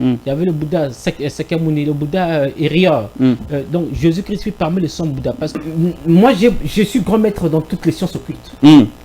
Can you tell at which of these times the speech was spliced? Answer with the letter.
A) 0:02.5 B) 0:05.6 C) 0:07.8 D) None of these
B